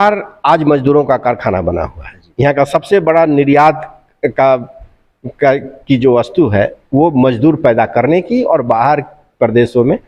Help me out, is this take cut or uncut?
uncut